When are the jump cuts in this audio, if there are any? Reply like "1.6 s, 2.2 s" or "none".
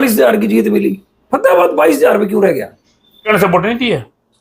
3.3 s